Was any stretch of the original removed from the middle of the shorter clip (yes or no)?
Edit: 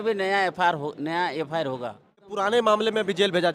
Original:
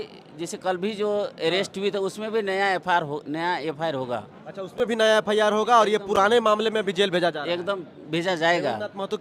yes